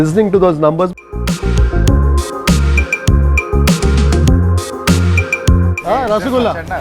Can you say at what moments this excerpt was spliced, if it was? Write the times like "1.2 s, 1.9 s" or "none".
0.9 s